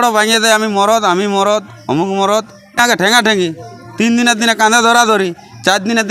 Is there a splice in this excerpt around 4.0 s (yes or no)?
no